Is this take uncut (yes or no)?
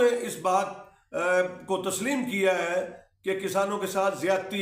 yes